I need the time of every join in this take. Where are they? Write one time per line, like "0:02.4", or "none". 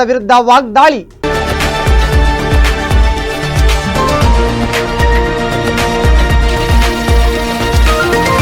0:01.1